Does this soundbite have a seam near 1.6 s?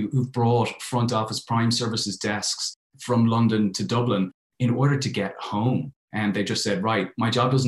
no; 0 cuts

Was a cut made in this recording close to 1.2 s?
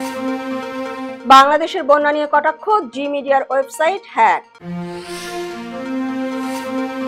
no; 0 cuts

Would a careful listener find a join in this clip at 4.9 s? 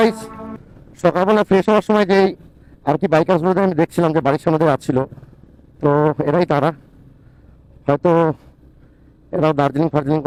no; 0 cuts

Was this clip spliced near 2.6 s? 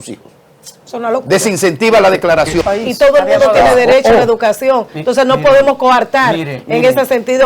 yes; 1 cut; at 2.6 s

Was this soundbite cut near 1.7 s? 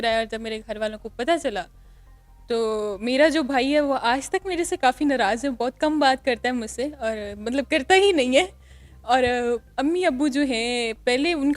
no; 0 cuts

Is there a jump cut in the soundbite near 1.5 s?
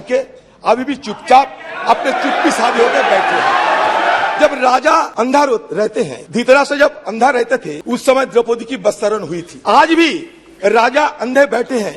no; 5 cuts; at 4.3 s, 5.1 s, 6.2 s, 7.7 s, 9.5 s

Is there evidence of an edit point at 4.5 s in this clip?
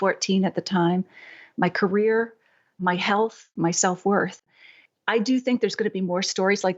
yes; 2 cuts; at 3.4 s, 4.5 s

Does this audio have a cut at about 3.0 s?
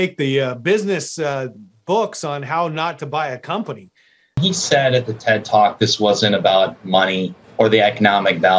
no; 1 cut; at 4.4 s

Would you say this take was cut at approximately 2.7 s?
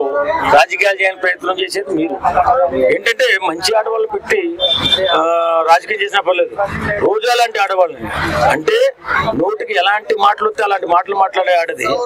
no; 0 cuts

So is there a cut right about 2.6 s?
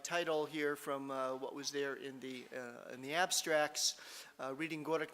yes; 1 cut; at 2.6 s

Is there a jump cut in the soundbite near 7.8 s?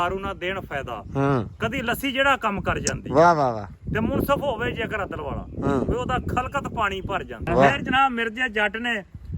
yes; 1 cut; at 7.8 s

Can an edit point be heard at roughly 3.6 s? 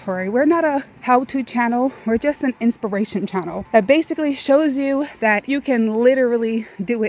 yes; 3 cuts; at 0.9 s, 3.6 s, 5.4 s

